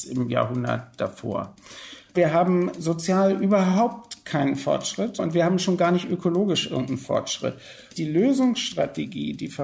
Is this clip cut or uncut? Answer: cut